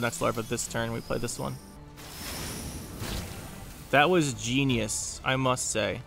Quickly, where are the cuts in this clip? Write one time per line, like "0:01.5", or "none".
0:01.8